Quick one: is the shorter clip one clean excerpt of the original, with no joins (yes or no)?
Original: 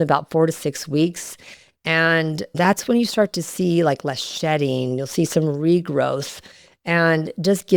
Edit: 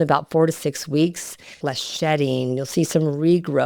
no